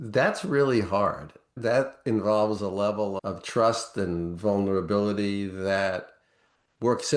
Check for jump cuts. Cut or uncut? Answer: cut